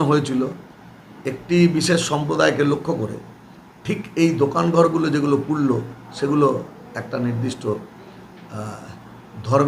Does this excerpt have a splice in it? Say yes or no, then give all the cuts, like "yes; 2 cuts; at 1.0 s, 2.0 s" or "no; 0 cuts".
no; 0 cuts